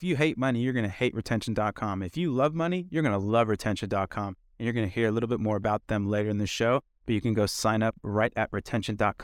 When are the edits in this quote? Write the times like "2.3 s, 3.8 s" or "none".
none